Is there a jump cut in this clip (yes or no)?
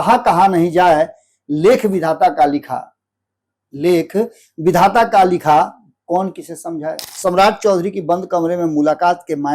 yes